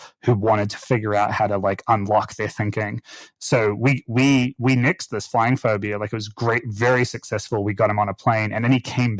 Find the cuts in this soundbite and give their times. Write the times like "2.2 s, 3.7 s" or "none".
none